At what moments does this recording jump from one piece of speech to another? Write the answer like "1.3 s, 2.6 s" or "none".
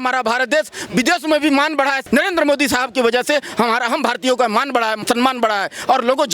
2.0 s, 5.0 s